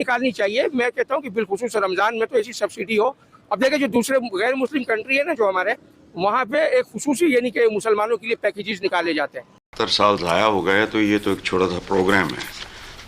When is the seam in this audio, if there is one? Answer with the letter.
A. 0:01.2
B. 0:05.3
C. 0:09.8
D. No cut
C